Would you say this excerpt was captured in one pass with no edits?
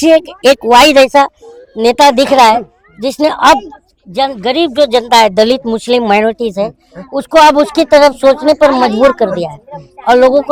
yes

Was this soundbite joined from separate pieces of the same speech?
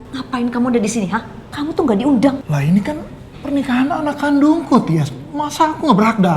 yes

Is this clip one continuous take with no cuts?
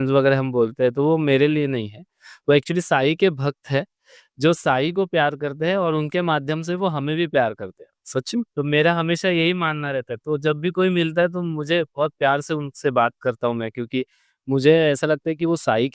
yes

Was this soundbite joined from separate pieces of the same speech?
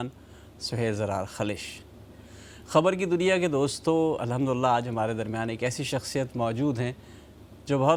no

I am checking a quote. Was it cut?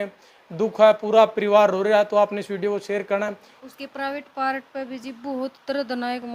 yes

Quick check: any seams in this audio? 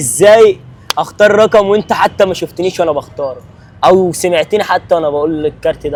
no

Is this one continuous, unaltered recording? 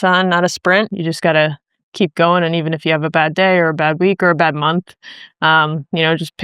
no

